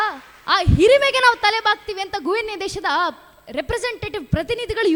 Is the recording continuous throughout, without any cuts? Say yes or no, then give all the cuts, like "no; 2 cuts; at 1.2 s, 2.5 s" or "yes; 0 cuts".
yes; 0 cuts